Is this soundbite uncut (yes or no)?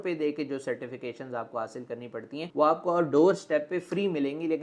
yes